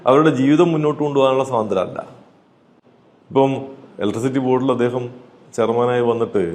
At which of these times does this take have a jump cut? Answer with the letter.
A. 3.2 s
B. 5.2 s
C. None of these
C